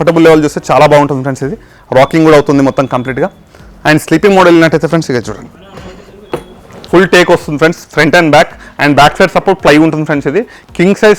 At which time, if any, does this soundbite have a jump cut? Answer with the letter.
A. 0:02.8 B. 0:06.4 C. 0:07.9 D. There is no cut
B